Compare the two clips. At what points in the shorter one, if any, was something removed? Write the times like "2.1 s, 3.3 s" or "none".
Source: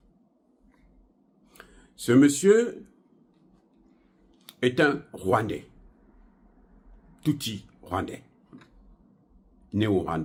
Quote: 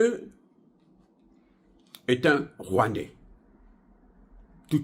none